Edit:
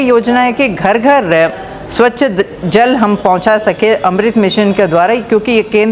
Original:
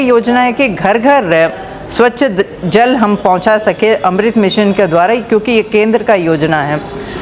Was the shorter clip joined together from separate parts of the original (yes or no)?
no